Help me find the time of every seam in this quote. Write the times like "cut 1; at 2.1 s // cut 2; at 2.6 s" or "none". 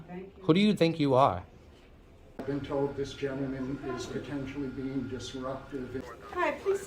cut 1; at 2.4 s // cut 2; at 6.0 s